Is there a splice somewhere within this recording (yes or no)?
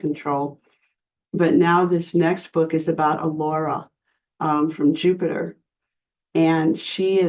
no